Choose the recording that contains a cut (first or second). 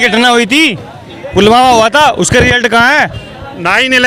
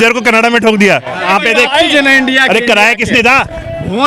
second